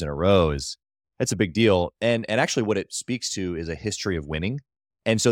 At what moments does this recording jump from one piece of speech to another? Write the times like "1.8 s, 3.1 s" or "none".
none